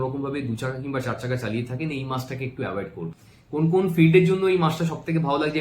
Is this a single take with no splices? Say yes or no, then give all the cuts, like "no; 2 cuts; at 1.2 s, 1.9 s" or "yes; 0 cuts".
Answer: no; 1 cut; at 3.2 s